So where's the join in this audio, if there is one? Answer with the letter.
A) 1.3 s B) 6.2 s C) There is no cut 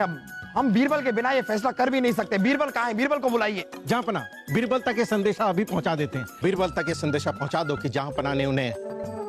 B